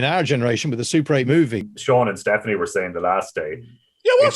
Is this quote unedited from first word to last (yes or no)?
no